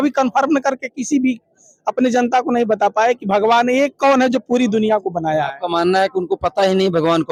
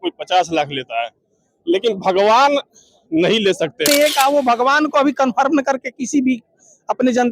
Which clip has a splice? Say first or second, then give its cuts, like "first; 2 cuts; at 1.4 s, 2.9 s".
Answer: second; 1 cut; at 3.9 s